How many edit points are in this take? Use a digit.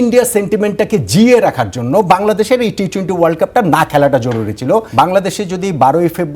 1